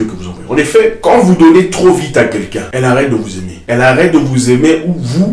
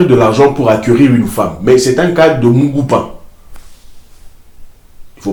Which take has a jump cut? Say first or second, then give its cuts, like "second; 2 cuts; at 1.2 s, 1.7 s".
first; 3 cuts; at 1.0 s, 2.6 s, 3.5 s